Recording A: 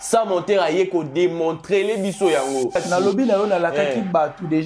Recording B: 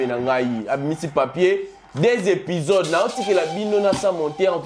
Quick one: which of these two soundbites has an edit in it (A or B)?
A